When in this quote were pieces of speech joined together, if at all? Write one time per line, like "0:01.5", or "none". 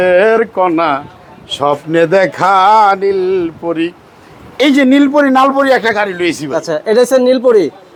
none